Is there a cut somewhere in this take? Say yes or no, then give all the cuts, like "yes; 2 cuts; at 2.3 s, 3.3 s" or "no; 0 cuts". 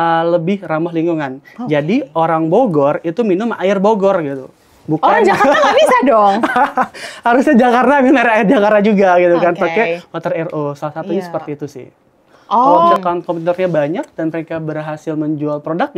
yes; 1 cut; at 12.9 s